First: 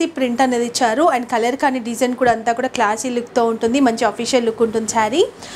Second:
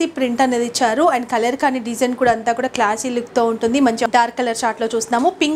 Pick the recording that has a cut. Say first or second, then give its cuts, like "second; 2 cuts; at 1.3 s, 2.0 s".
second; 1 cut; at 4.1 s